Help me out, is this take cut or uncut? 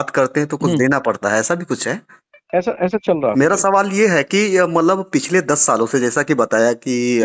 uncut